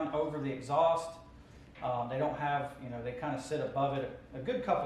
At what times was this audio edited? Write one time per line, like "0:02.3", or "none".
none